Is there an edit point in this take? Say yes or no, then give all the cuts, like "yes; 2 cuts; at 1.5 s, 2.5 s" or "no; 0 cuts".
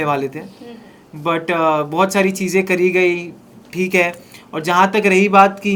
no; 0 cuts